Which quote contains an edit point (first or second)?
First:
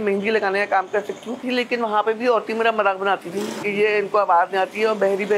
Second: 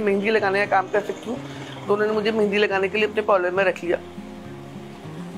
first